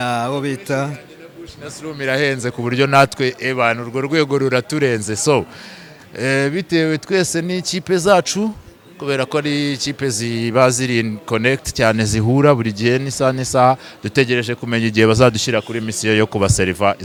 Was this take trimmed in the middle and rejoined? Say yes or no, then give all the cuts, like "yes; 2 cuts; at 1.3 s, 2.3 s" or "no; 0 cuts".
no; 0 cuts